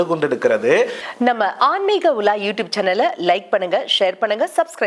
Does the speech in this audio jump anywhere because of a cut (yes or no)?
yes